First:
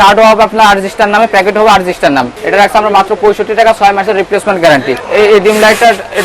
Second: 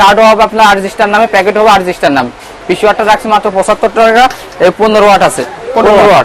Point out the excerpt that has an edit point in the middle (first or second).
first